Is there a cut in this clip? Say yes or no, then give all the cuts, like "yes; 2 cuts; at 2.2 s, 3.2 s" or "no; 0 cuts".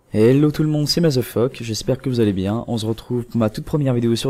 yes; 1 cut; at 3.3 s